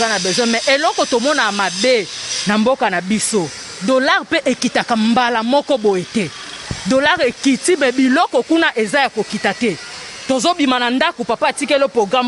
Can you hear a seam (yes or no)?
no